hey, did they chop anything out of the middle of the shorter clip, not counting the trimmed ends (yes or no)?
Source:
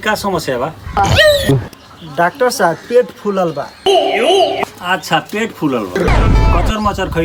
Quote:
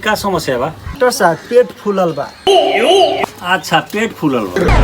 yes